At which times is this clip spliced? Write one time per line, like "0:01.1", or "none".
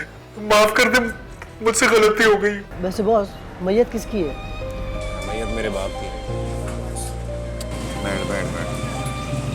0:02.7

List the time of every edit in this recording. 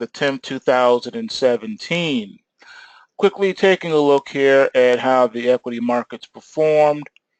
none

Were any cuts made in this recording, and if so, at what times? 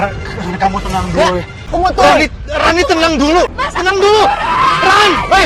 0:01.7
0:03.5

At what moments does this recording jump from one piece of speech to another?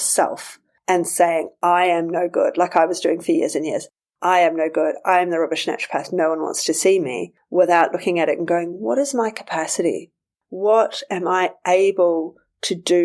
none

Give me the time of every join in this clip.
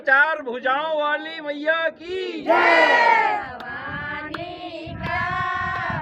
0:03.4

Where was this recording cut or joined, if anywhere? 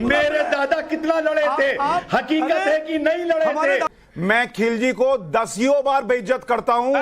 0:04.0

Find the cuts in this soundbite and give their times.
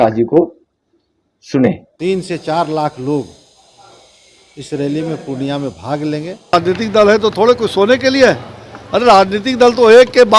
0:01.9
0:06.5

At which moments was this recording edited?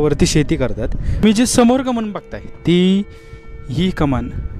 0:01.2

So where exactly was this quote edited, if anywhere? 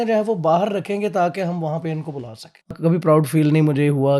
0:02.8

